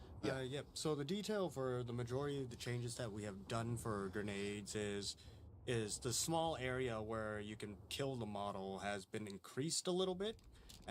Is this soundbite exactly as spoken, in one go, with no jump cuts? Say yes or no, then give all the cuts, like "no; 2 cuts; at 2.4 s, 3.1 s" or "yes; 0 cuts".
yes; 0 cuts